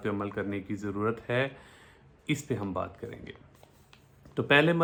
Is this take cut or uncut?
uncut